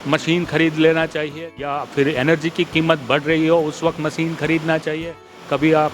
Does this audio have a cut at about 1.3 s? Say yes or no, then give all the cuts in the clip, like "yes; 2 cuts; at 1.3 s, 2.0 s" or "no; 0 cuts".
yes; 1 cut; at 1.3 s